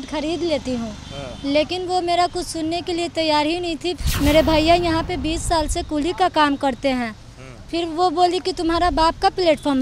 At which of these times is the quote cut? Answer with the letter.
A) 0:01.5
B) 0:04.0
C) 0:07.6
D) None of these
B